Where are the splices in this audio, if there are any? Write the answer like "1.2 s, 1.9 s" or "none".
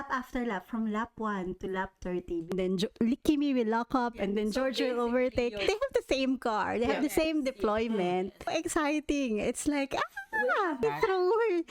2.5 s, 5.6 s, 8.5 s, 10.8 s

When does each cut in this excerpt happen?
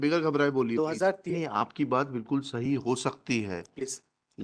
1.2 s

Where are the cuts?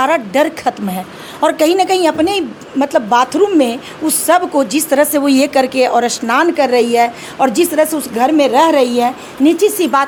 none

